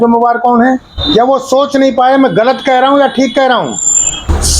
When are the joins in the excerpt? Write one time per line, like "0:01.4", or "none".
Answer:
0:00.9